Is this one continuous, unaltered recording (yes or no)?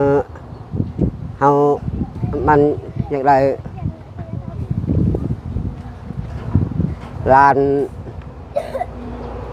yes